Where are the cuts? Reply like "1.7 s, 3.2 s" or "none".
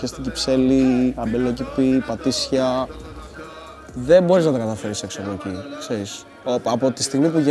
none

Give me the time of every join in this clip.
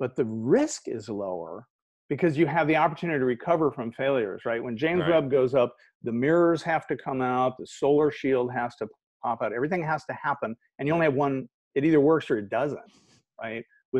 none

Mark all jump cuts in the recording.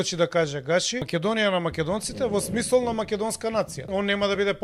1.1 s, 3.9 s

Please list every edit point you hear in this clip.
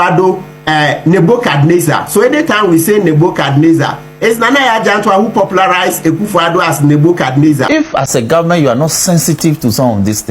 7.7 s

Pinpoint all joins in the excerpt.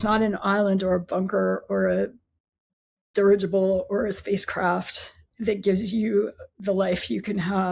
5.3 s

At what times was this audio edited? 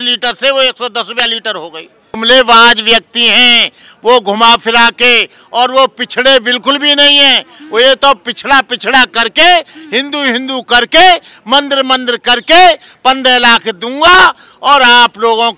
2.1 s

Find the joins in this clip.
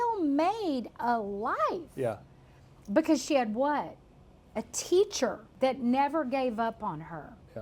5.4 s

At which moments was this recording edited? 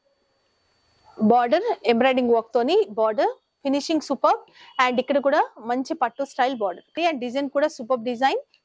6.9 s

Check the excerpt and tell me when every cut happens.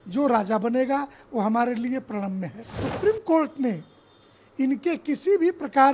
2.8 s

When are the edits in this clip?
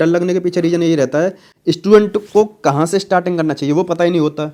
none

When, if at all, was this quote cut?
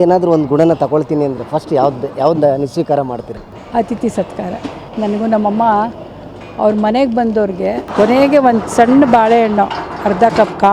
7.9 s

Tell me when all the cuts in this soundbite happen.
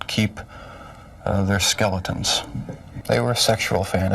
none

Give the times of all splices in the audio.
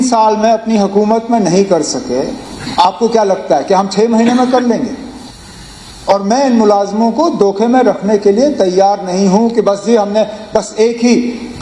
none

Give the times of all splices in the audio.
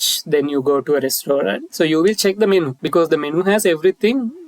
1.6 s, 2.8 s

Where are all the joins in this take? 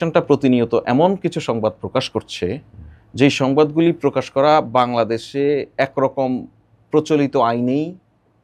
none

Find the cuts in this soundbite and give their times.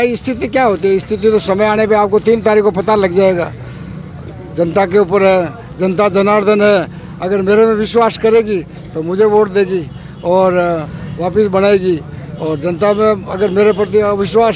none

